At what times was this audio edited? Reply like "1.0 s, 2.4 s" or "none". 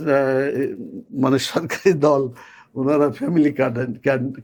none